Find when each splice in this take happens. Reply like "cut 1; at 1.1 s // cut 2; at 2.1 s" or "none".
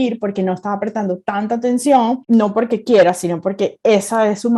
cut 1; at 2.2 s